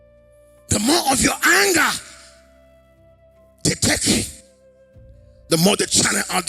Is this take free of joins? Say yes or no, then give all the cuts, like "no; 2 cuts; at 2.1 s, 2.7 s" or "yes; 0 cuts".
no; 3 cuts; at 0.7 s, 2.0 s, 3.6 s